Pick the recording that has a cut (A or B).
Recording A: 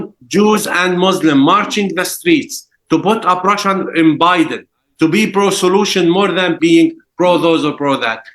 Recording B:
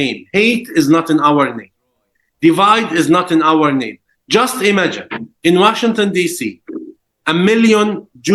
A